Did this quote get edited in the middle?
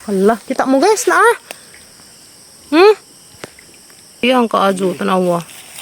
yes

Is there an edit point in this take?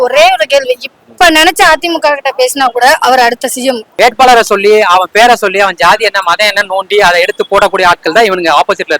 yes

